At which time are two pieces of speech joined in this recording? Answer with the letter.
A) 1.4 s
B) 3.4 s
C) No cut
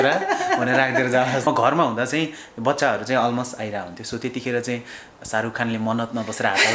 A